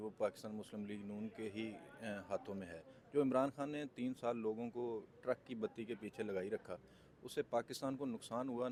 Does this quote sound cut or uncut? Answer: uncut